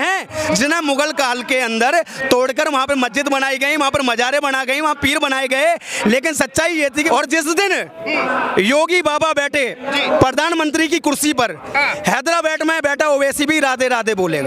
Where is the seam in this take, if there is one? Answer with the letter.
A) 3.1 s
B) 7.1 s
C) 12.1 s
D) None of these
B